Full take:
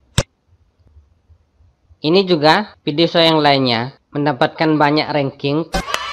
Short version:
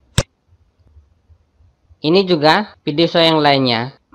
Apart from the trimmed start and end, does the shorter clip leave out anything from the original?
no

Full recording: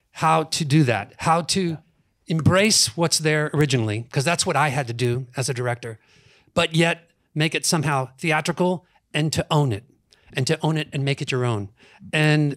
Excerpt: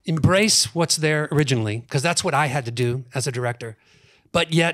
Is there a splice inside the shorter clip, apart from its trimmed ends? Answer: no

